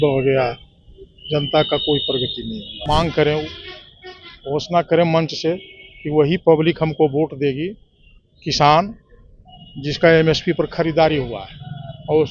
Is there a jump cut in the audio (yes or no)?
yes